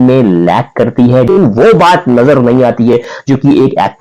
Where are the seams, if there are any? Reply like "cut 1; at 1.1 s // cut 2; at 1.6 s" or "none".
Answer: cut 1; at 1.3 s